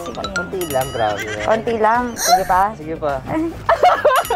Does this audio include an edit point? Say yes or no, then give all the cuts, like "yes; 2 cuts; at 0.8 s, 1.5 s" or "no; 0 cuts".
yes; 1 cut; at 2.2 s